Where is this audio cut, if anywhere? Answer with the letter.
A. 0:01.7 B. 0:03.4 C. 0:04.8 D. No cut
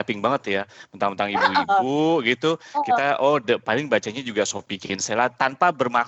D